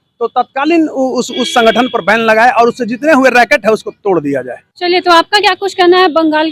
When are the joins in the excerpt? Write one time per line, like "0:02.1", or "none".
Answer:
none